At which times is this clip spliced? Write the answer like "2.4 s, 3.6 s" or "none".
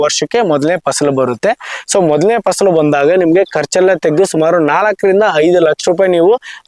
none